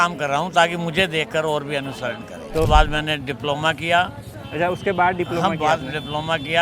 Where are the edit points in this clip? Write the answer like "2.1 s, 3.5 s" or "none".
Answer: 2.7 s